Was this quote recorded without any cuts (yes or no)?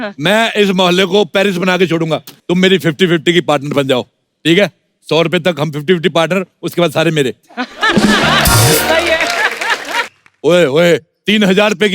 no